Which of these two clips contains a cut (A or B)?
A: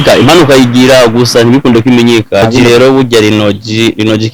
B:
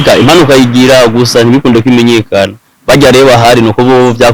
A